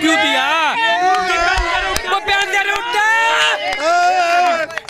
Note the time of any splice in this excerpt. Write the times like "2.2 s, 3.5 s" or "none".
none

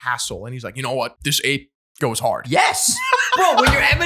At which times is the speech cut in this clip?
1.2 s

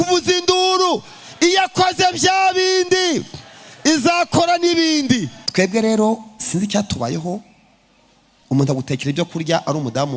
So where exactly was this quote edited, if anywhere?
5.4 s

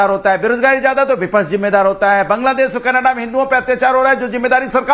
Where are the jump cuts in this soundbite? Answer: none

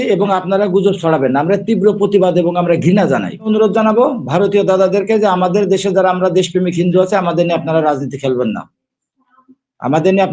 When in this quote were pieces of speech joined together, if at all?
3.5 s

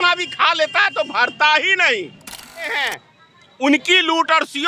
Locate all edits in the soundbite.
2.7 s

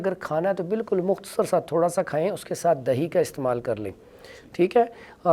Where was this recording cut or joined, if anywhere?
none

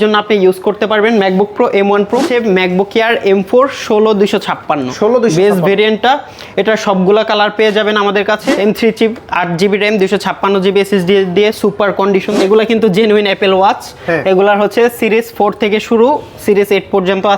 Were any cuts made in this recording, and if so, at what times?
2.3 s, 8.5 s, 12.3 s

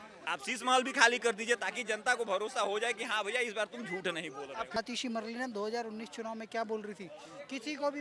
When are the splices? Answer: 4.8 s

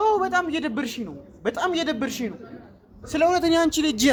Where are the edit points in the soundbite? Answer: none

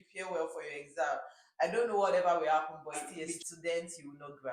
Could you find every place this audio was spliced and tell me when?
3.0 s

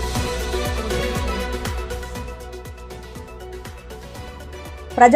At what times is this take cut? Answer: 2.4 s

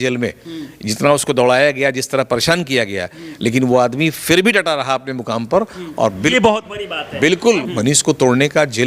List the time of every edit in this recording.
7.6 s

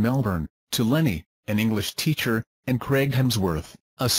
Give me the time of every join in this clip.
none

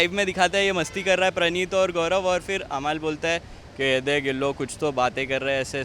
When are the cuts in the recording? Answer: none

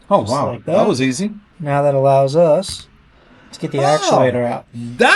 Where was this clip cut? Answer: 1.5 s

